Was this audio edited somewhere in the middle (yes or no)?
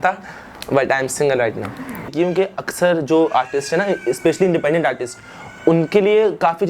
yes